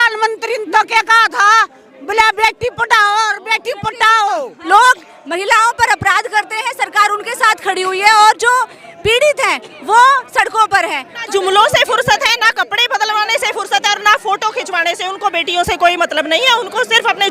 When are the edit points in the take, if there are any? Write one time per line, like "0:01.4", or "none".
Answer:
0:04.6
0:11.2